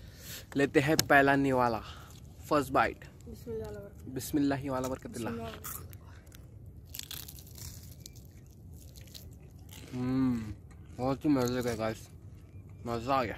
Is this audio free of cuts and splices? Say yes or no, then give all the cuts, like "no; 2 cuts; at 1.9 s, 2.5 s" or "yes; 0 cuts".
yes; 0 cuts